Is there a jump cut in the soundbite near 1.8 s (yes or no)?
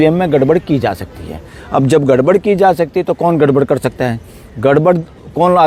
no